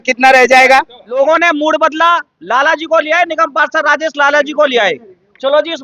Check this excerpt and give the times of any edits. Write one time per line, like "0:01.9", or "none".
0:01.0